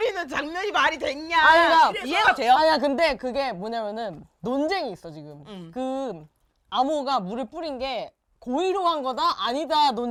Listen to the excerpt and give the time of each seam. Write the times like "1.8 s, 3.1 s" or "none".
none

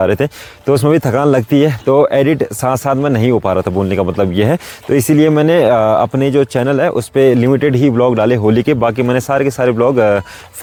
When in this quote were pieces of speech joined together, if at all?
none

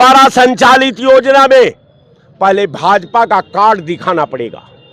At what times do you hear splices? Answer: none

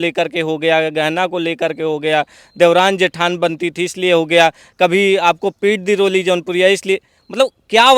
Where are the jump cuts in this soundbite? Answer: none

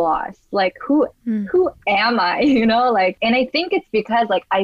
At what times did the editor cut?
3.2 s

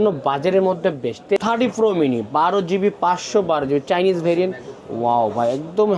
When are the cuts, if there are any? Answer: 1.4 s

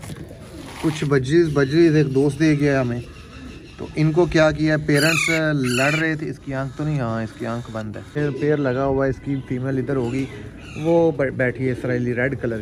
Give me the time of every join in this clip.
8.2 s

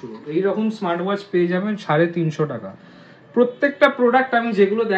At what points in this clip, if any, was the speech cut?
none

